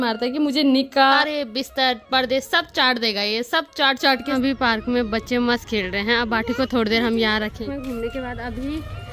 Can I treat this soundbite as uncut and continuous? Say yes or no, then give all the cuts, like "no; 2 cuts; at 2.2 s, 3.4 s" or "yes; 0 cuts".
no; 3 cuts; at 1.2 s, 4.3 s, 7.6 s